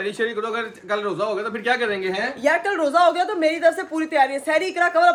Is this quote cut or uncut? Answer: uncut